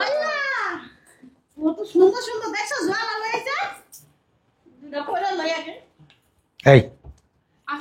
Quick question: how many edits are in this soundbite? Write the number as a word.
zero